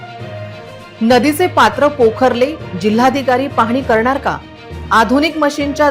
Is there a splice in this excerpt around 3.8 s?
no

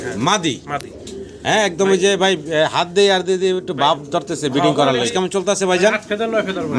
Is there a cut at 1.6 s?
no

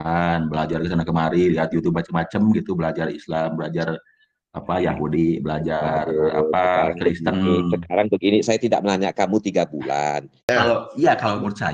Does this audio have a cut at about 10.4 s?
yes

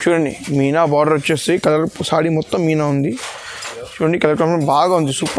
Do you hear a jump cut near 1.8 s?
no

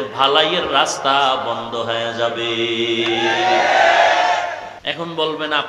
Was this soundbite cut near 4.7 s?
yes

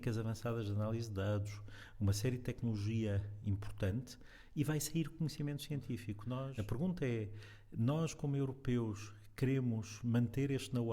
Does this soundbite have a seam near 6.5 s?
yes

